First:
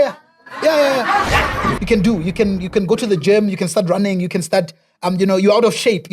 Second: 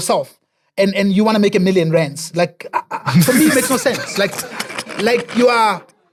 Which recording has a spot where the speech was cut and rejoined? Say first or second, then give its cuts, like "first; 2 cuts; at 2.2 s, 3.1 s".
first; 1 cut; at 1.8 s